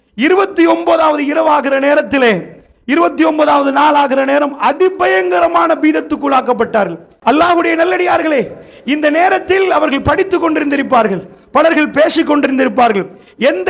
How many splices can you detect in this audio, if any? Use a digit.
1